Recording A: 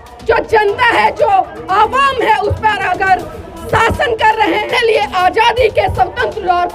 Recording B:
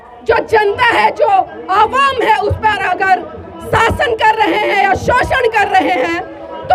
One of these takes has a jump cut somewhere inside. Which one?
A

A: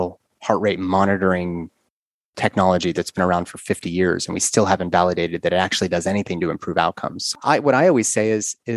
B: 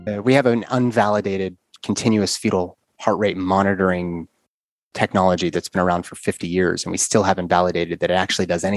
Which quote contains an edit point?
A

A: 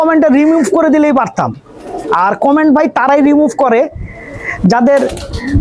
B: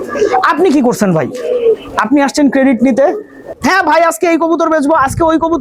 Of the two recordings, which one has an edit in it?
B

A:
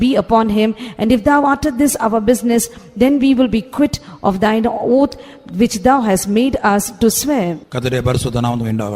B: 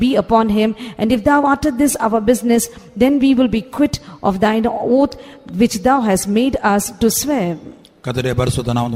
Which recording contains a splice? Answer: A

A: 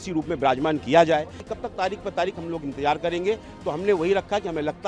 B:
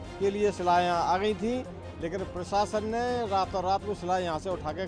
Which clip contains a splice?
A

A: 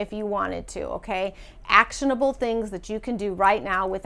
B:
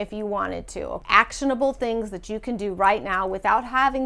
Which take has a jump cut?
B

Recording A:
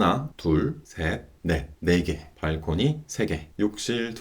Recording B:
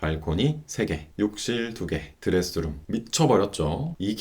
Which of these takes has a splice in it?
B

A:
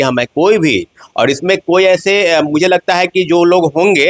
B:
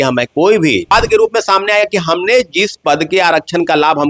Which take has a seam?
B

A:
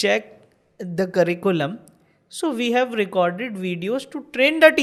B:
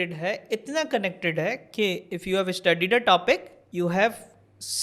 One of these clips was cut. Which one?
B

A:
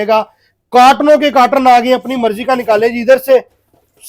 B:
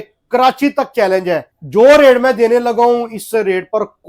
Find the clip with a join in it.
B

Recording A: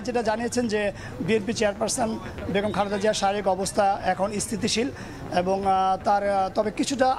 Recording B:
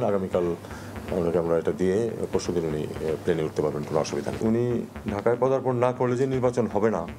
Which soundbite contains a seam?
B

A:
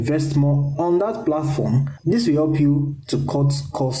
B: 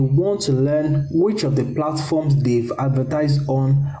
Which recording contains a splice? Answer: A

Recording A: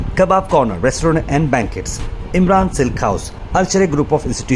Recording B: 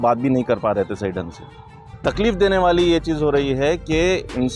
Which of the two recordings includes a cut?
B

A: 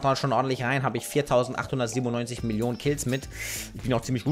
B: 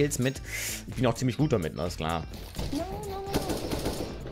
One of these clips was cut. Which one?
B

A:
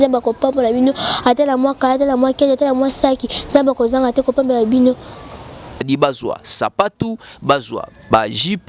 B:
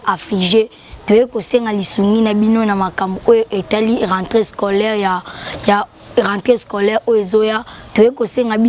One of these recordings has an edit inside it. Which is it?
A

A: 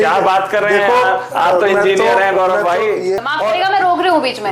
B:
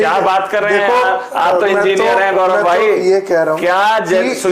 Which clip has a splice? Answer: A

